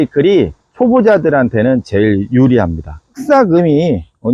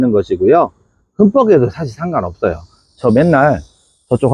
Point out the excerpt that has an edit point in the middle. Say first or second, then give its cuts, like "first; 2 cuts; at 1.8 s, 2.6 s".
first; 1 cut; at 3.2 s